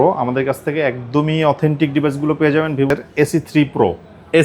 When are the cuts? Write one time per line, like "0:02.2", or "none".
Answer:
0:02.9